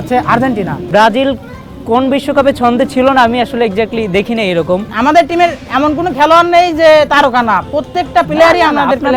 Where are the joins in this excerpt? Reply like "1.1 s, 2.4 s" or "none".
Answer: 0.8 s, 4.9 s